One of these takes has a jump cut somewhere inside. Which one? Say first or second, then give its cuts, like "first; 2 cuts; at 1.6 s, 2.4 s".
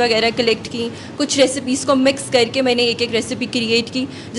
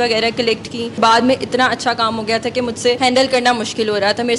second; 2 cuts; at 1.0 s, 3.0 s